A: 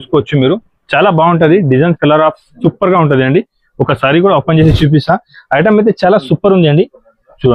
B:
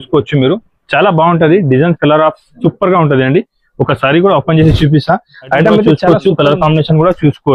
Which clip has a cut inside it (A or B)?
B